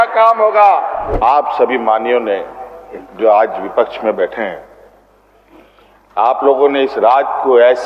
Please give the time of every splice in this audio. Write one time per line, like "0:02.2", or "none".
0:01.0